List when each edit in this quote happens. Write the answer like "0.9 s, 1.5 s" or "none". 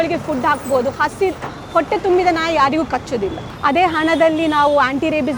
3.5 s